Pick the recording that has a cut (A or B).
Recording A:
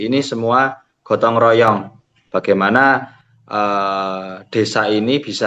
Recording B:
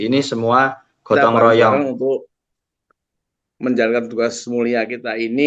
B